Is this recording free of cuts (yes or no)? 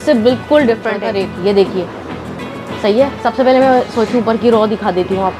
no